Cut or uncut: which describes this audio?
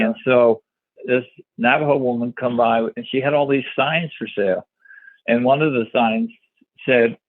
cut